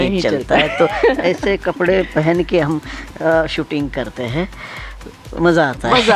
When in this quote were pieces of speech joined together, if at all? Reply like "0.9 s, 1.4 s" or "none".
none